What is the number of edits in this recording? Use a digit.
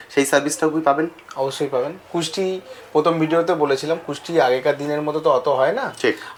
0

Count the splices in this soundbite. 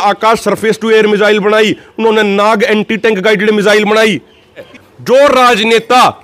1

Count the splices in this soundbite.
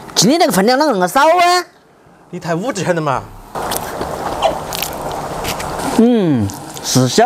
2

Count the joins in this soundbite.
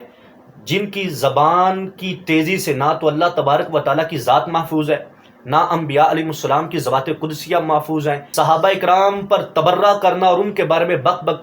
1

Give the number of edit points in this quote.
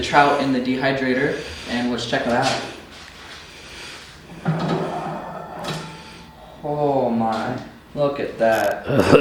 0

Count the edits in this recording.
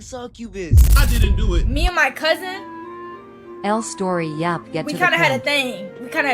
1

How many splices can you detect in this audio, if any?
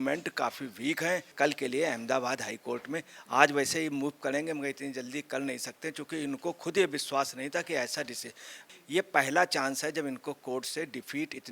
2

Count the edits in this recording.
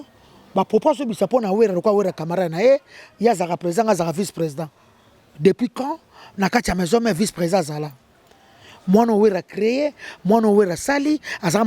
0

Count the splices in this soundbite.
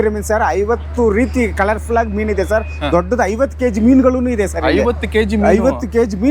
0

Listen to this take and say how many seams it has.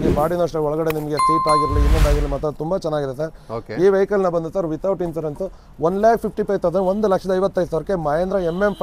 0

